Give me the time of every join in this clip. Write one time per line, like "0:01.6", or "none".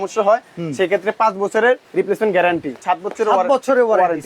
0:01.9
0:02.8